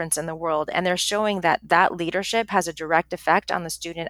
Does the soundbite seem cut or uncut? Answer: uncut